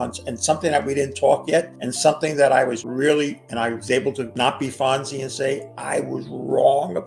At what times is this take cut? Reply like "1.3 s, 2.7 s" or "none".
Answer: 1.8 s, 2.8 s, 4.3 s, 5.7 s